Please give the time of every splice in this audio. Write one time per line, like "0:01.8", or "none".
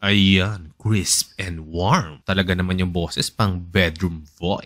0:02.1